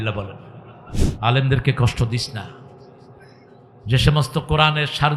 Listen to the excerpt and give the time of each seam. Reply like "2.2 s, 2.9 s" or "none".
1.0 s